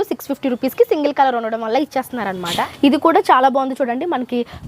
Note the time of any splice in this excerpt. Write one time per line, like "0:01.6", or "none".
0:02.6